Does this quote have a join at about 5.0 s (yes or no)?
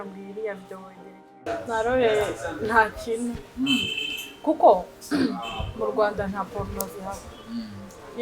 no